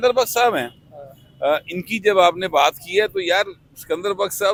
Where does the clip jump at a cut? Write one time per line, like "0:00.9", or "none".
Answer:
none